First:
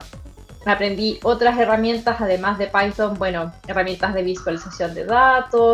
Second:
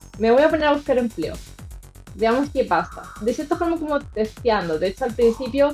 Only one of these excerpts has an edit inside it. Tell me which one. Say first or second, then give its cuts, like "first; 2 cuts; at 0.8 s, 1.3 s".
second; 1 cut; at 3.1 s